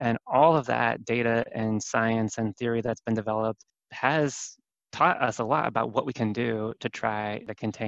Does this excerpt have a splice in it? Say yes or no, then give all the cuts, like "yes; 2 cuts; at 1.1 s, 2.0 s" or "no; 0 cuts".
no; 0 cuts